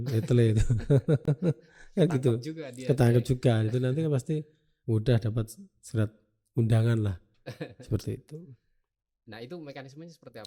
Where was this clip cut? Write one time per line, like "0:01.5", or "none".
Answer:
none